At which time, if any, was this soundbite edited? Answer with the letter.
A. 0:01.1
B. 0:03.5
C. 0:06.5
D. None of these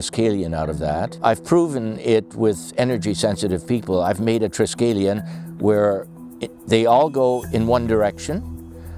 A